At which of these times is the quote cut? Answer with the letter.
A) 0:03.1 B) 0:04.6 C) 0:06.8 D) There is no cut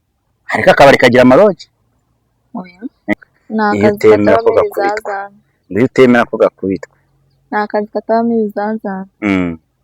A